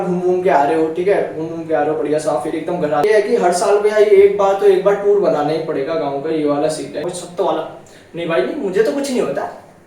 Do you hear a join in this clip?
yes; 2 cuts; at 3.0 s, 7.1 s

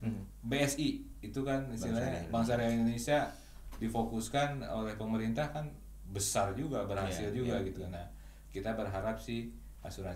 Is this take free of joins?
yes; 0 cuts

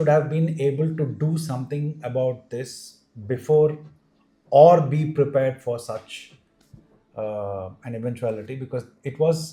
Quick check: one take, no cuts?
yes; 0 cuts

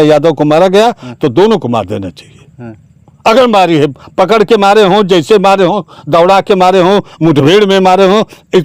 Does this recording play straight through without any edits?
yes; 0 cuts

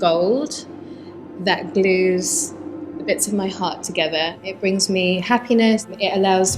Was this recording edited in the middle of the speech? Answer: yes; 1 cut; at 4.4 s

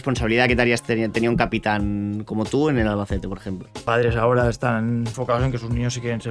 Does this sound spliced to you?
yes; 2 cuts; at 3.8 s, 5.1 s

